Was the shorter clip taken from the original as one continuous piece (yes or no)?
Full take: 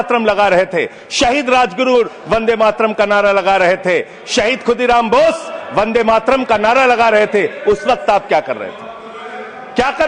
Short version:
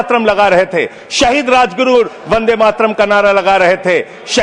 yes